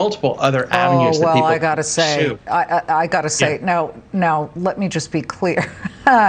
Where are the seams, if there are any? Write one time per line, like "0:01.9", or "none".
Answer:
none